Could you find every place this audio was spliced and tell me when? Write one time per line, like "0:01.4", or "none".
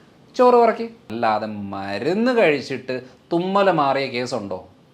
0:01.0